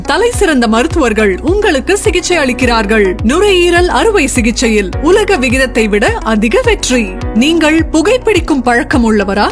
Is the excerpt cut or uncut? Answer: uncut